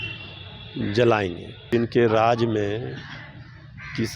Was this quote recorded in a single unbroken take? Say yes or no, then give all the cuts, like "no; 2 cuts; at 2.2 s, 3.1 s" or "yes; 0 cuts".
no; 1 cut; at 1.7 s